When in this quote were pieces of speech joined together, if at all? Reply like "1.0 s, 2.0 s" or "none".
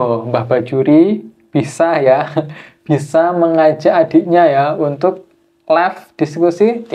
none